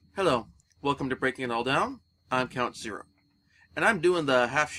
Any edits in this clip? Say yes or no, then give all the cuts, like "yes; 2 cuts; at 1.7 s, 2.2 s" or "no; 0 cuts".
no; 0 cuts